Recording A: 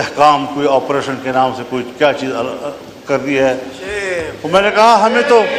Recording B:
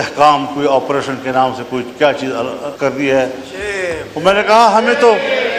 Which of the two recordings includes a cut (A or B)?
B